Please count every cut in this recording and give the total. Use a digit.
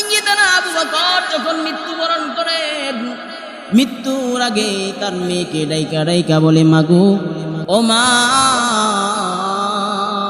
1